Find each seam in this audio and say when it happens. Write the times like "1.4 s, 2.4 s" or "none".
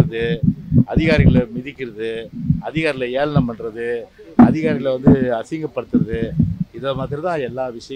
none